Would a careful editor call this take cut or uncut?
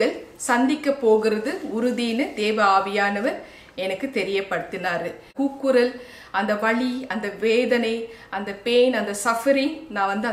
cut